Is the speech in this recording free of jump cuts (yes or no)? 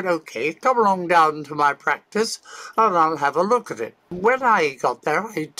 no